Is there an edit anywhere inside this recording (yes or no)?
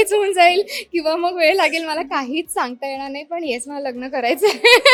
no